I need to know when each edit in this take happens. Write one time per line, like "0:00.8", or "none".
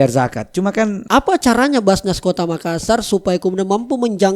0:01.0